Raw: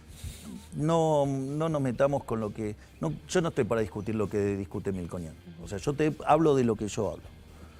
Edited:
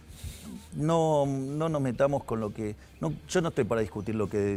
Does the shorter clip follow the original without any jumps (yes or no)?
yes